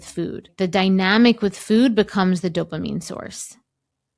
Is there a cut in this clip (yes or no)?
no